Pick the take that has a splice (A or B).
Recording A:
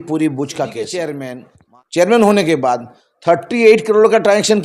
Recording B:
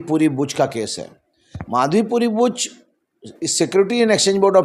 A